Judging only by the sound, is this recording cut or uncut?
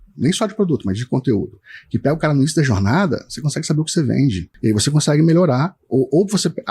cut